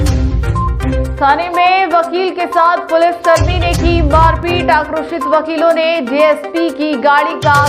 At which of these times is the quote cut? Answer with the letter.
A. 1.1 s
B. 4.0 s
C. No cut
A